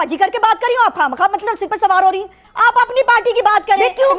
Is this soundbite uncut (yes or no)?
no